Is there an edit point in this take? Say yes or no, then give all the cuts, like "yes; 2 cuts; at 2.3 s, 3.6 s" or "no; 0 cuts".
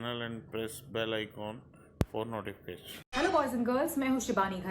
yes; 1 cut; at 3.0 s